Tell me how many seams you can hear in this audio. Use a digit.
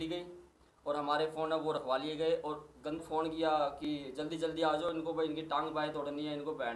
1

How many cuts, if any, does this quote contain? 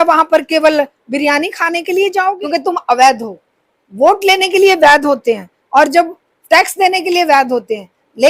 1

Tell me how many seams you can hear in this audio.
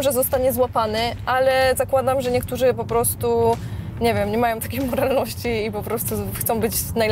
0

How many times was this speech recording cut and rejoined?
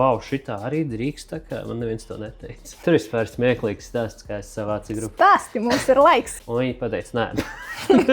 2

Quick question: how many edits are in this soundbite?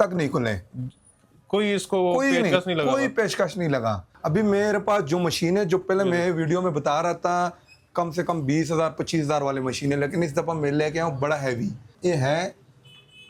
0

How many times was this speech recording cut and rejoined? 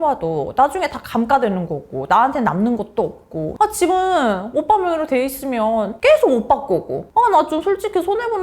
1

